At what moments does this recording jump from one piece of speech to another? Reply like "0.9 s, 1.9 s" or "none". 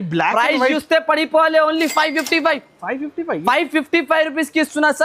none